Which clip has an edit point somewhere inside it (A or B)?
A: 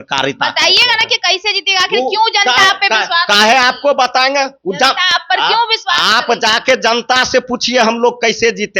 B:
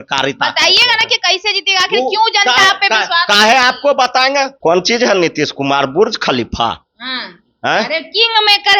B